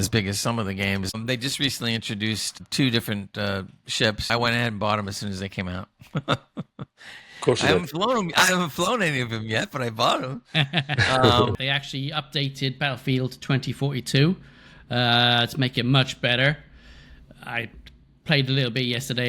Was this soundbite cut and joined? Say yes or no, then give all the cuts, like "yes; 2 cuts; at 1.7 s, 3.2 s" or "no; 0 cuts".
yes; 4 cuts; at 1.1 s, 2.6 s, 4.3 s, 11.5 s